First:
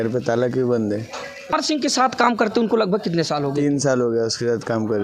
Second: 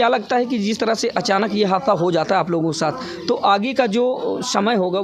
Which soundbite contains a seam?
first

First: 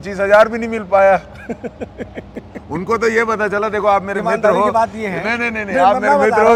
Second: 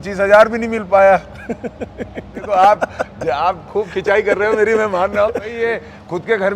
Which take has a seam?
second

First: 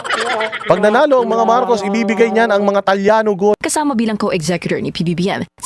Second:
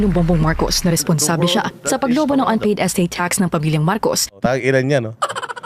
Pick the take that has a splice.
first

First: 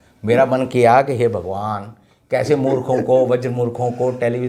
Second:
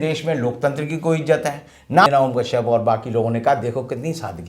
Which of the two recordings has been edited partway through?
second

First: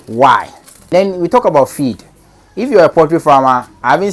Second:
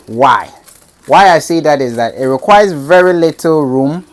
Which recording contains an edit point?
first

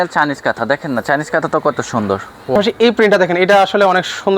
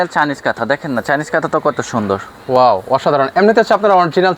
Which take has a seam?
first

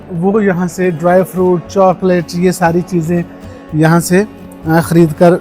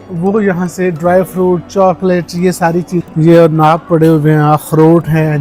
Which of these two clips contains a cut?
second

